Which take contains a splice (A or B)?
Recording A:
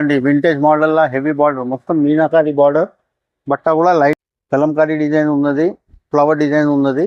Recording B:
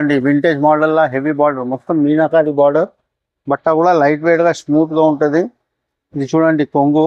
A